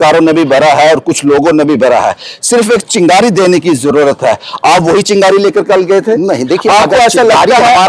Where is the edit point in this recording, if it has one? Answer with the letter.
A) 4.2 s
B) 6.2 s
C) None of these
C